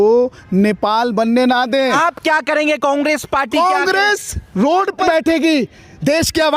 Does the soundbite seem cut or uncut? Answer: cut